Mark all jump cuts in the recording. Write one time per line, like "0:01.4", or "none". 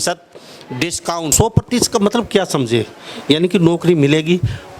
0:01.3